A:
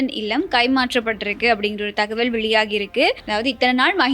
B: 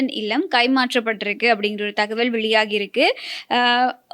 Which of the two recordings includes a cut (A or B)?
A